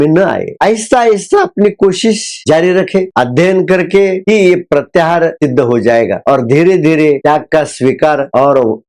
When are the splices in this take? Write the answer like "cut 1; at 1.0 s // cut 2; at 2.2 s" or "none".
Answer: none